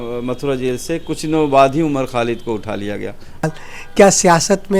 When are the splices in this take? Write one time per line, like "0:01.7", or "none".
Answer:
0:03.4